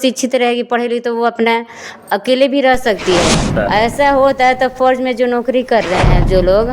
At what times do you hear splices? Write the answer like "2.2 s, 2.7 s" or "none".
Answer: 3.5 s